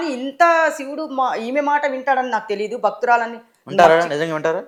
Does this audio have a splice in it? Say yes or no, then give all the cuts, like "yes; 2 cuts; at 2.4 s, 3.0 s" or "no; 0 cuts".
no; 0 cuts